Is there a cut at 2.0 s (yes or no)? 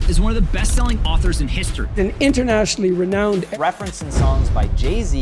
no